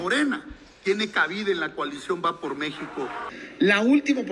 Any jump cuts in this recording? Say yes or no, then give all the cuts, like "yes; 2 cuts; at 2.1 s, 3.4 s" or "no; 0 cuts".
yes; 1 cut; at 3.2 s